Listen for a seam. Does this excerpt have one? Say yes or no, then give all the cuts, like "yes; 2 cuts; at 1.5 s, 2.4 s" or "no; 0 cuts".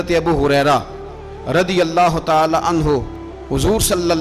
no; 0 cuts